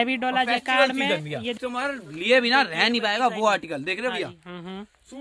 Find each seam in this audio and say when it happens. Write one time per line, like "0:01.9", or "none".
0:01.6